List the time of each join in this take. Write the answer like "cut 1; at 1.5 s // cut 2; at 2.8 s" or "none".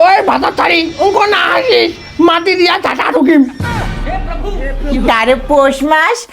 cut 1; at 5.1 s

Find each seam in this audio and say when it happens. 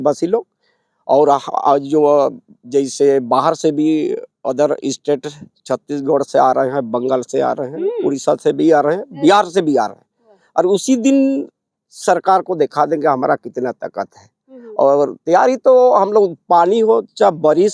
none

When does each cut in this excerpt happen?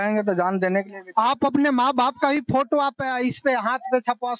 none

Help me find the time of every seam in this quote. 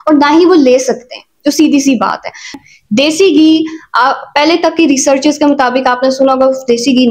cut 1; at 2.6 s

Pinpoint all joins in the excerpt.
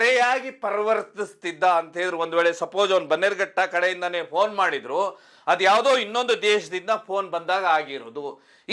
none

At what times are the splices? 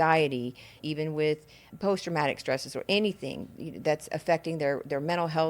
cut 1; at 0.8 s // cut 2; at 1.7 s

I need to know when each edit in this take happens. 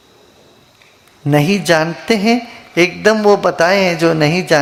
none

